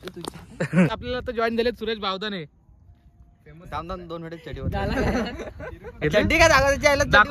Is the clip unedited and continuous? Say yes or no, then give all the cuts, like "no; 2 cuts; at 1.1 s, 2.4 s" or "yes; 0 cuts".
no; 1 cut; at 0.9 s